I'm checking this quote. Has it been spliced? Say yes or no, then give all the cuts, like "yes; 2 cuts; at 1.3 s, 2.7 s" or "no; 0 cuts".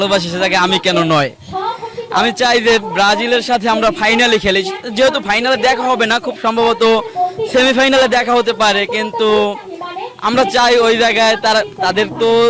no; 0 cuts